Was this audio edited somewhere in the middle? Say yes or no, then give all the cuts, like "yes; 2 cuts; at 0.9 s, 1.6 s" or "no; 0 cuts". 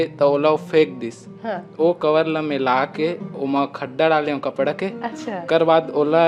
no; 0 cuts